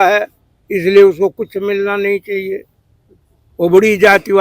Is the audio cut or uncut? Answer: uncut